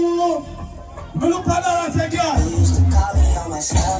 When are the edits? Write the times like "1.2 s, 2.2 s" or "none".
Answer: none